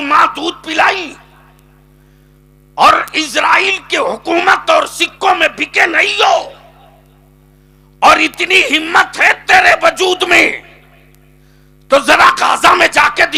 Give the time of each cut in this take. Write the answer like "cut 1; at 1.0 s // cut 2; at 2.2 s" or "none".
none